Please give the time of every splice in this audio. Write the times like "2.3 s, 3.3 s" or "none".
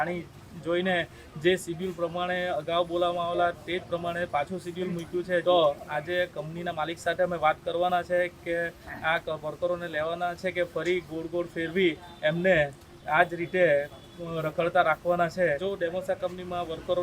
5.4 s, 15.6 s